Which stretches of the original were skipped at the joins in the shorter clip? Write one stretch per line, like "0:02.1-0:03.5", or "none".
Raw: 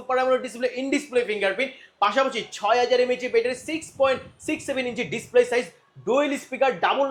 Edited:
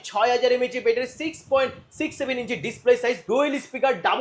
0:05.7-0:06.0